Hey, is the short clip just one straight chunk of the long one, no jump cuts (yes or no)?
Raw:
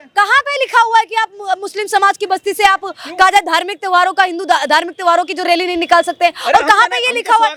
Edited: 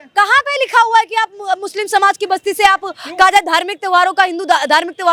yes